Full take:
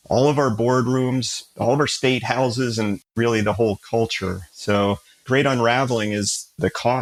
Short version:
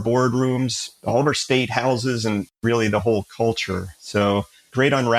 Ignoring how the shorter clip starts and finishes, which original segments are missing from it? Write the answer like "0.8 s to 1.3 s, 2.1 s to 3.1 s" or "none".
none